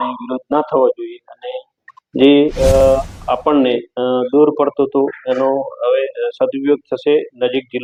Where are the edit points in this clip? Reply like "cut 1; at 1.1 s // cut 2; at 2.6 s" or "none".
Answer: none